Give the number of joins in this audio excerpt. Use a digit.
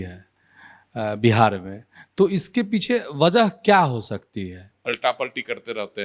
1